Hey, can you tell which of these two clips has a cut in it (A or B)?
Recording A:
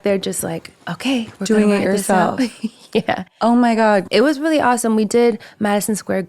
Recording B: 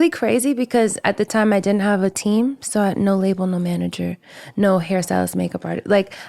A